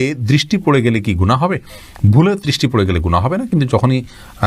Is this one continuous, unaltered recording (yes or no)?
yes